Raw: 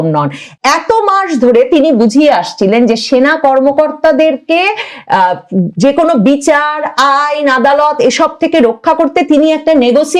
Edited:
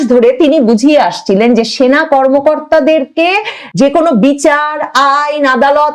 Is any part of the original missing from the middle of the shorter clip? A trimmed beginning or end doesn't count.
yes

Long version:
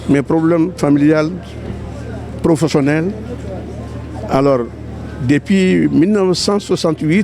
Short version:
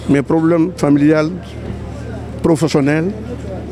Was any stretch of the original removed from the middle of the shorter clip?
no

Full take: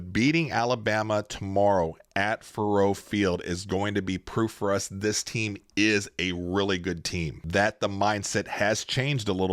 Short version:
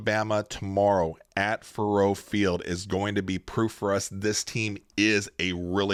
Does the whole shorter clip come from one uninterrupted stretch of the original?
yes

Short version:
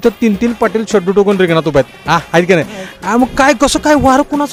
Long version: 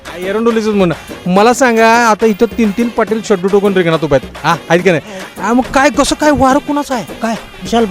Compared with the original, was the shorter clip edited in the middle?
no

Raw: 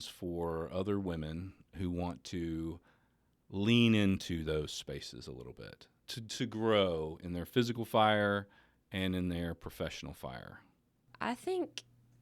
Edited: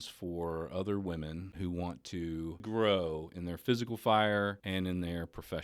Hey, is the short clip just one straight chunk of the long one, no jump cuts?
no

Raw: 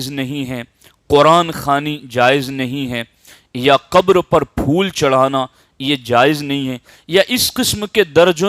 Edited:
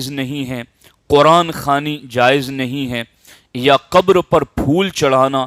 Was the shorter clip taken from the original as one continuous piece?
yes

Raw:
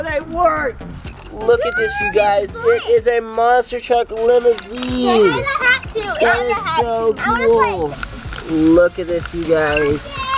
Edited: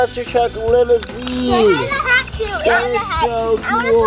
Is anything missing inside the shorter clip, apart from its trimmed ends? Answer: no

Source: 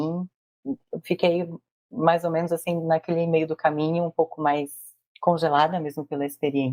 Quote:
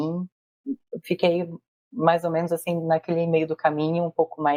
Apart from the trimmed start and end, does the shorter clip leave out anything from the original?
no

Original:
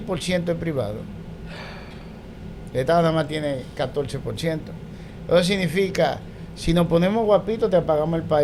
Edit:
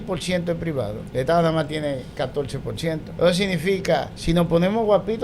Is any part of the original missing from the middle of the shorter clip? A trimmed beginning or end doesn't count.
yes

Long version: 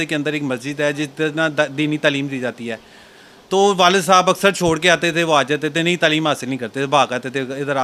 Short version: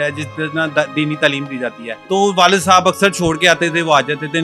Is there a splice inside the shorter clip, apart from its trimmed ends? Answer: yes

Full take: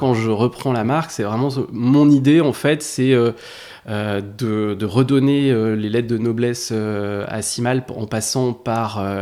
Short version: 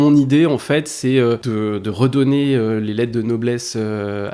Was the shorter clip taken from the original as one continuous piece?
no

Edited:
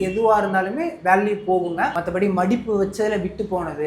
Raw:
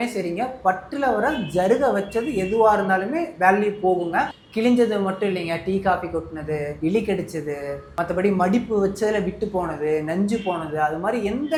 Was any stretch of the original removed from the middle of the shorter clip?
yes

